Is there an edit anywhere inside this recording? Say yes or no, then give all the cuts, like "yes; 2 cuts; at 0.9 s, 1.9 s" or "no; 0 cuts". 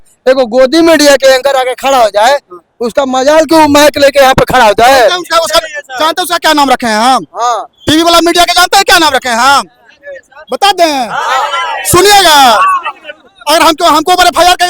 no; 0 cuts